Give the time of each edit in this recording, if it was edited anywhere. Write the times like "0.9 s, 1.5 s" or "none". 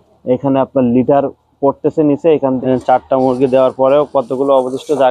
2.6 s